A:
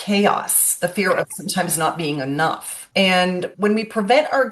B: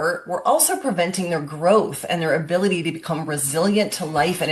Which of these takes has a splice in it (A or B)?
A